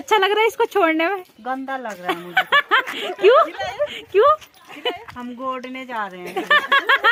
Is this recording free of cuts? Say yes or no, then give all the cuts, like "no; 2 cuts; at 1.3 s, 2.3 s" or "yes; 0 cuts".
yes; 0 cuts